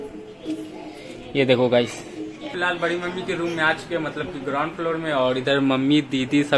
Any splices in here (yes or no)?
yes